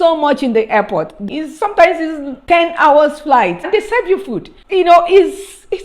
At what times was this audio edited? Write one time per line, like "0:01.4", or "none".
0:01.2
0:03.7